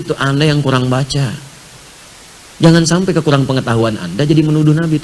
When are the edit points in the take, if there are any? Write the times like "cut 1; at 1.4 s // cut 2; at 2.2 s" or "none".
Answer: none